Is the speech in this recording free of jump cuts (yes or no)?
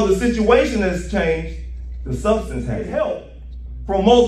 no